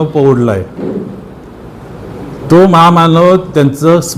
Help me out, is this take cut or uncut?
uncut